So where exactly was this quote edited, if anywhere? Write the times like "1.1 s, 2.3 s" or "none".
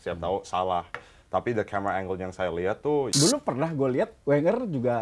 3.1 s